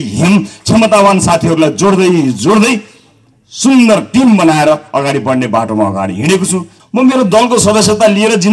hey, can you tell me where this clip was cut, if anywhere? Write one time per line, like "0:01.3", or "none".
0:06.7